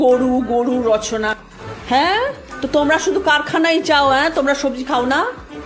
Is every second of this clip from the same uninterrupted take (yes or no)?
yes